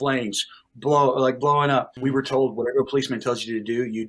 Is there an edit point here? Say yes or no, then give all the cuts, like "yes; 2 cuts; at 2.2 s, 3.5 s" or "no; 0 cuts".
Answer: yes; 1 cut; at 1.9 s